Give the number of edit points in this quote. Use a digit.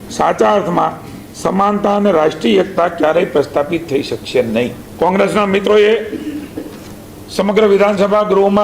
1